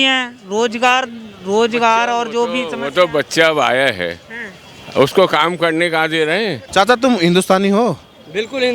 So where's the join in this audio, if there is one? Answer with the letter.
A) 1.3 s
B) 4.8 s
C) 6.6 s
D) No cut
C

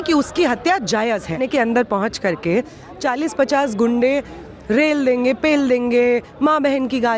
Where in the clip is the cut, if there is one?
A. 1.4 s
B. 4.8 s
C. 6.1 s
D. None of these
A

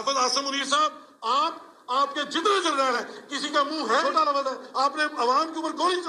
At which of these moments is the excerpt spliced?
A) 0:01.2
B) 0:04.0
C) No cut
B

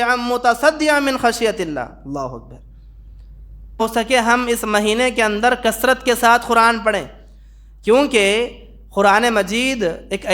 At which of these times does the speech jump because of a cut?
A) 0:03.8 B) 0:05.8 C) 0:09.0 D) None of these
A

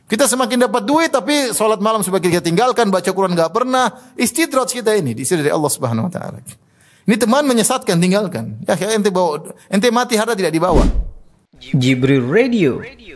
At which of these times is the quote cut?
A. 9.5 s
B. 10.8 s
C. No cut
B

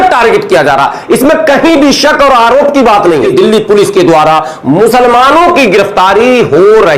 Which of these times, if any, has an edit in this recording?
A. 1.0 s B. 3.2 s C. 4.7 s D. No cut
B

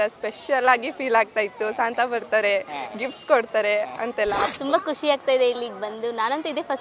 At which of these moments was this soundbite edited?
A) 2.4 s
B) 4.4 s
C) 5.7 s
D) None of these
B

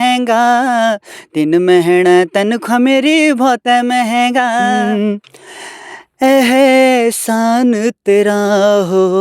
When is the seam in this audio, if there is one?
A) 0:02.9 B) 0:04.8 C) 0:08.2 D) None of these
B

